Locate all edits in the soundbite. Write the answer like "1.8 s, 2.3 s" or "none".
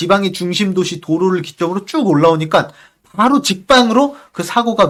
none